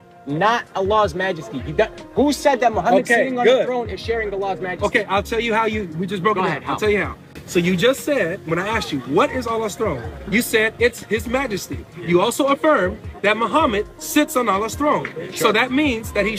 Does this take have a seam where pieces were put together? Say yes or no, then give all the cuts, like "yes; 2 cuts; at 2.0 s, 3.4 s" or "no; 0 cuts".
no; 0 cuts